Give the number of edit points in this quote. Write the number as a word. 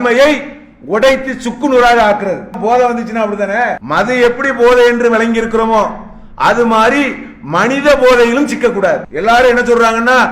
three